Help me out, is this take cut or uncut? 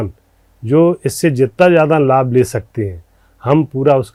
uncut